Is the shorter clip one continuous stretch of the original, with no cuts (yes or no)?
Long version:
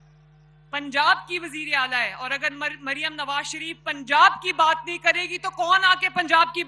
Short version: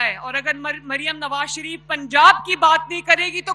yes